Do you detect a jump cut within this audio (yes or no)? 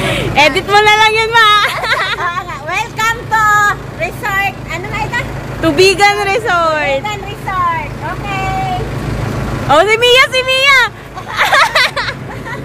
no